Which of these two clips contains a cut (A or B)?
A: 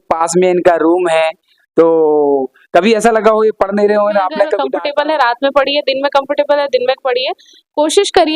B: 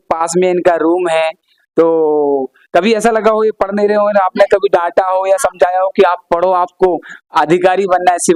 A